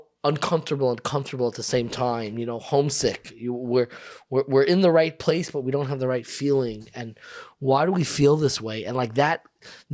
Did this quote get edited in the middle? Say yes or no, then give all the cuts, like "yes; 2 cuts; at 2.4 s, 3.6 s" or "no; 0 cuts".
no; 0 cuts